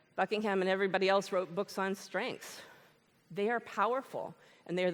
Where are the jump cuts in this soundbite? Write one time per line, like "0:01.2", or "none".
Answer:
none